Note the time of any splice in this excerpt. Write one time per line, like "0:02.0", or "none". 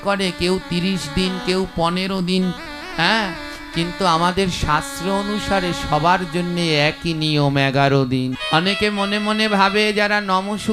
0:08.4